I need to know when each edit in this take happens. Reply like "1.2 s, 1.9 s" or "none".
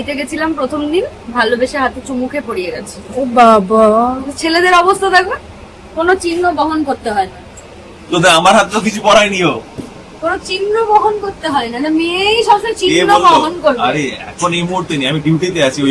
none